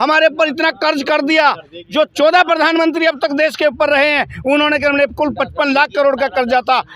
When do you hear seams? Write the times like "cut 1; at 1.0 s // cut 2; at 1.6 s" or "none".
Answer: none